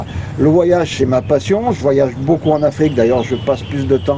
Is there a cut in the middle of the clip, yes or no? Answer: no